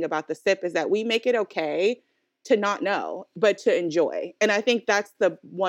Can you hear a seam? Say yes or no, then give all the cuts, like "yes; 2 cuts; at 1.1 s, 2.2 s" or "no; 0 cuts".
no; 0 cuts